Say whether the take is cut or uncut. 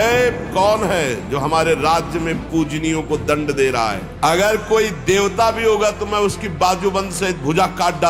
cut